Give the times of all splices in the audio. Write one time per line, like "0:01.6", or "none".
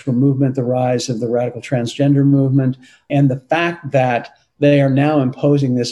0:03.1

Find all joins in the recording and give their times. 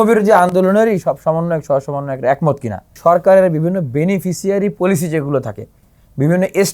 0:02.8

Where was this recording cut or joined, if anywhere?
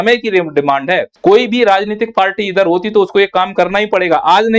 0:01.1

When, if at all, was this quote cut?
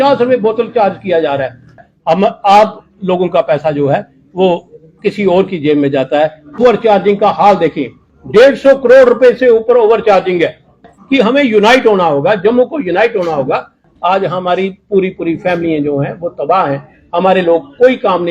0:01.8
0:06.6
0:10.8
0:13.8

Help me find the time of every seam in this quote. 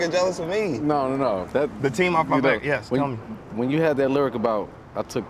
none

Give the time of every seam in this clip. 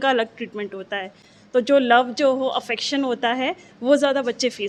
none

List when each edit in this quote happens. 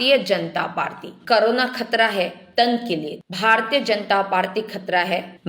0:01.1

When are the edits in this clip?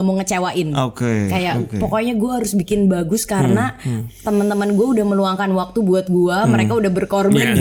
none

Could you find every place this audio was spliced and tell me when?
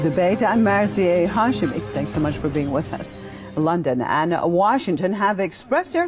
none

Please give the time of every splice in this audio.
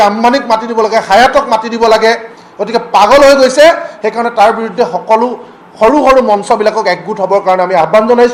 none

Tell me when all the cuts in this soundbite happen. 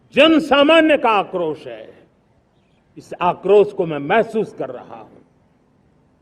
none

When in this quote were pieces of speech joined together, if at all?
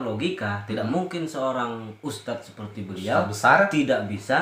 none

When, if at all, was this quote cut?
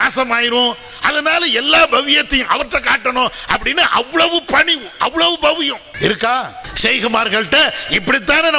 0:05.8
0:06.6

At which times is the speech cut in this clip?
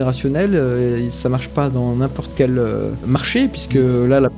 0:03.3

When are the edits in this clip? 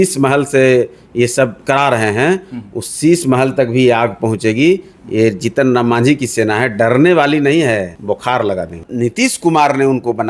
0:01.6
0:07.9
0:08.8

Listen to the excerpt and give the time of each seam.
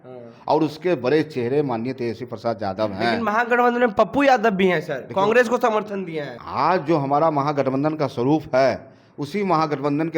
0:06.2

